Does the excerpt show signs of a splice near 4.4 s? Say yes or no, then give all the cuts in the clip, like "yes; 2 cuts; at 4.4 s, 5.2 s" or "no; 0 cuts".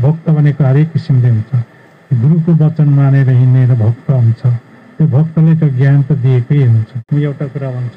no; 1 cut; at 6.9 s